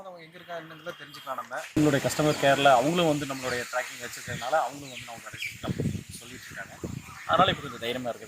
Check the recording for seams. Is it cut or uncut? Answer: cut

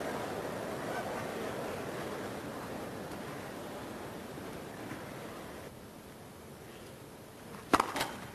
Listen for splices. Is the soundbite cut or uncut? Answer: uncut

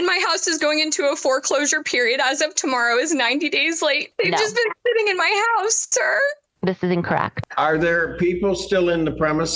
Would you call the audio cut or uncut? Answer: cut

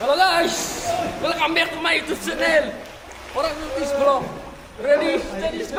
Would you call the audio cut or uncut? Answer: uncut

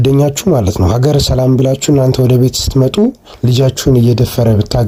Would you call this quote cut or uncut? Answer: uncut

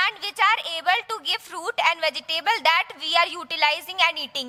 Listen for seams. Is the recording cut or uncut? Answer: uncut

